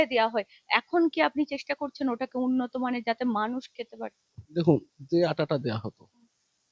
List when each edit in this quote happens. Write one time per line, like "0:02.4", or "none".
none